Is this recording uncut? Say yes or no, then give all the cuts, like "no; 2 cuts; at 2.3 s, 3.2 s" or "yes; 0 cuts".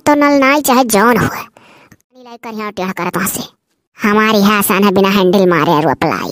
no; 1 cut; at 2.0 s